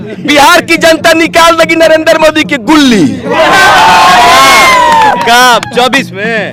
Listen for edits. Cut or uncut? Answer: uncut